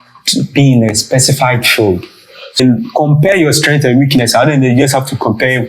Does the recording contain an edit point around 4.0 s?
no; 1 cut; at 2.6 s

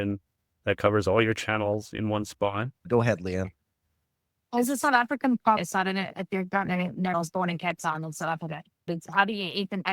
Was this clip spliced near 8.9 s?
yes; 4 cuts; at 2.8 s, 5.6 s, 7.1 s, 8.9 s

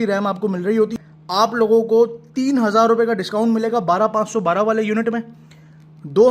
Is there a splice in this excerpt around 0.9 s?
yes; 1 cut; at 0.9 s

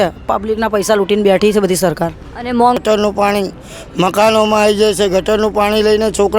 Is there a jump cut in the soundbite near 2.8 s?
yes; 1 cut; at 2.8 s

